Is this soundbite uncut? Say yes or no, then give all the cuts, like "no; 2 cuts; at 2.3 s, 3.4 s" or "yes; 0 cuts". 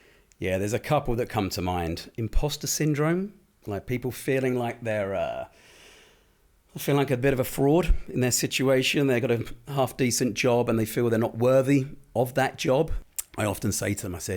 no; 1 cut; at 13.0 s